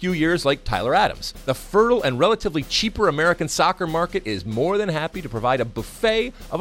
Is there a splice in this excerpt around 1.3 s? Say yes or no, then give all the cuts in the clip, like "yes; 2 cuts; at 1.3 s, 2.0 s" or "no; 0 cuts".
yes; 1 cut; at 1.3 s